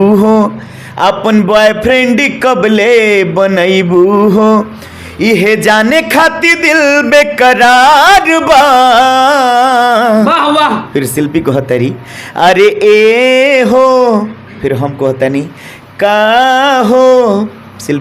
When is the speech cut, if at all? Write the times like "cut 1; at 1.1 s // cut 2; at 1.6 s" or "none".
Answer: none